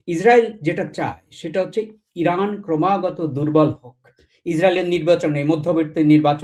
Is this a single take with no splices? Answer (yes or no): yes